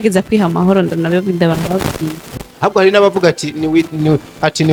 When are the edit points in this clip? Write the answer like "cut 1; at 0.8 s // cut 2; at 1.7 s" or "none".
none

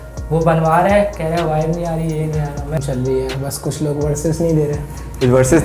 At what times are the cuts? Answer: cut 1; at 2.8 s

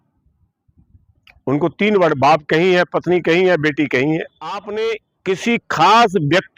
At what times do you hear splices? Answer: cut 1; at 4.7 s

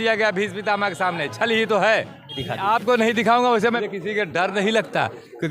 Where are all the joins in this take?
cut 1; at 2.4 s // cut 2; at 3.9 s

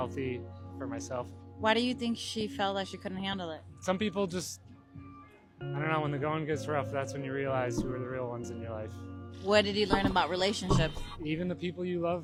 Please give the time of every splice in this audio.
none

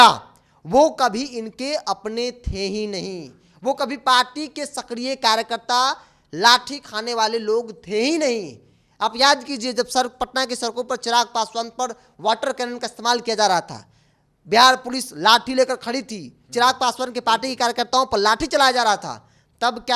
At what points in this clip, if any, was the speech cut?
none

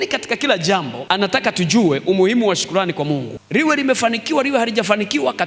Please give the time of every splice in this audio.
none

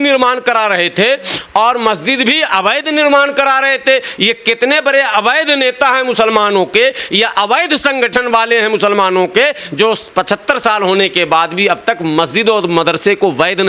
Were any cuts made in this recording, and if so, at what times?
none

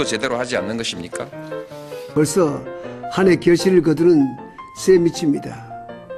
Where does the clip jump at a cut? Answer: cut 1; at 1.0 s

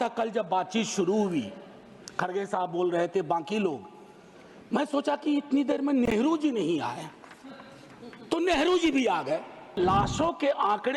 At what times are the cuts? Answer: cut 1; at 9.8 s

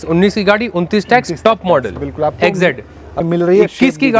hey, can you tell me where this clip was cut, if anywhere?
cut 1; at 3.1 s

